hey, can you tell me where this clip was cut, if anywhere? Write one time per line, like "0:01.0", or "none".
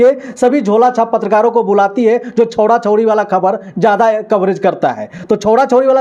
none